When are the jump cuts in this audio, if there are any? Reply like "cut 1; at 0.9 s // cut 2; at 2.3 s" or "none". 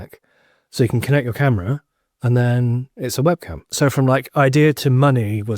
cut 1; at 3.7 s